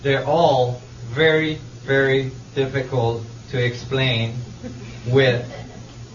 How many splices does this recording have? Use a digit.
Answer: 1